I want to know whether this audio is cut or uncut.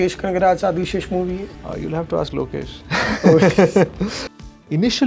cut